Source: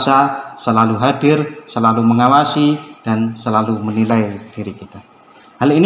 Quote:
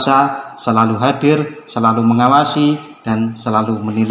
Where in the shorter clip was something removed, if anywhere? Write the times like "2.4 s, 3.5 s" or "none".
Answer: none